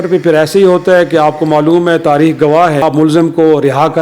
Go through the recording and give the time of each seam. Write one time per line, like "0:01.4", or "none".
0:02.8